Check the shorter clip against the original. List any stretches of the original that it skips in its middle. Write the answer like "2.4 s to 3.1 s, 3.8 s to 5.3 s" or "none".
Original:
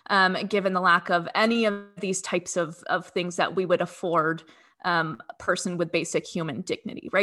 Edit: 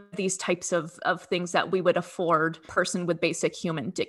4.5 s to 5.3 s